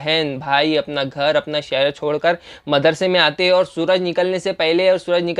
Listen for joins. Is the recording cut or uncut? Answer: uncut